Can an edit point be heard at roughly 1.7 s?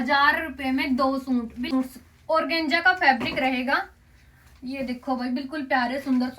yes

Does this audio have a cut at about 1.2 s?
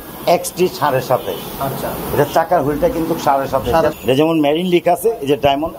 no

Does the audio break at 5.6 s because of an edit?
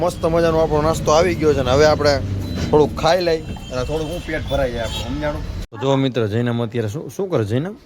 yes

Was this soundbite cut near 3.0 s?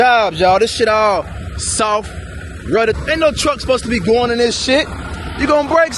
yes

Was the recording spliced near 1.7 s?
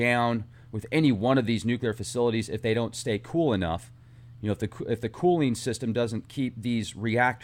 yes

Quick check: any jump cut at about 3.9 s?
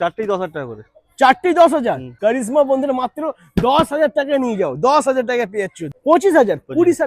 no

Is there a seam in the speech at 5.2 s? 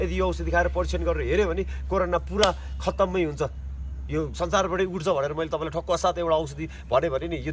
no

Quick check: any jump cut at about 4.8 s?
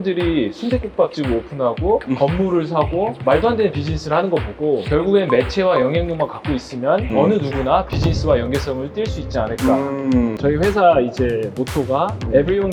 yes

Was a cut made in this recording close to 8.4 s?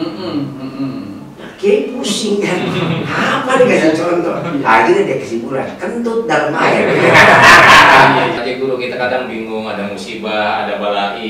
yes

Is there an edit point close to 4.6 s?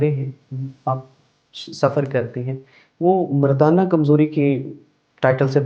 no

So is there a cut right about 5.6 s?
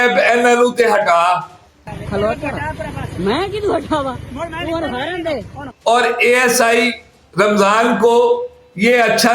yes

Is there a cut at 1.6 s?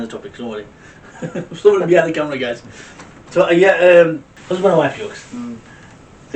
no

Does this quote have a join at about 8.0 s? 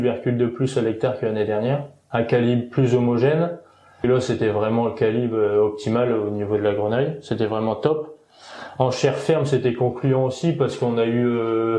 no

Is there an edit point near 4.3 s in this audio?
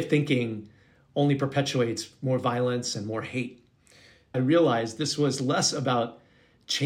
yes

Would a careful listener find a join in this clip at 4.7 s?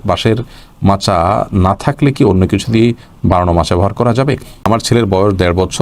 yes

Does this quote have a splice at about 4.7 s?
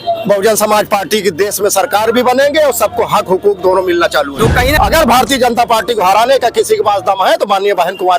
yes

